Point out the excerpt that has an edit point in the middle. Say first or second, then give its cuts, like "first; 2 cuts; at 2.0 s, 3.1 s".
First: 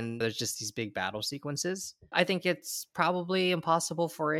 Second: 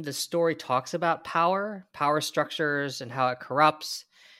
first; 1 cut; at 2.1 s